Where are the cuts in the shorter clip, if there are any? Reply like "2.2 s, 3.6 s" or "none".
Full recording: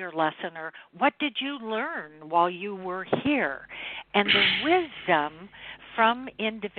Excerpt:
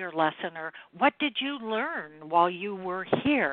none